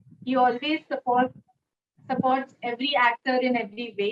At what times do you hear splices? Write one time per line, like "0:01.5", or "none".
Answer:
none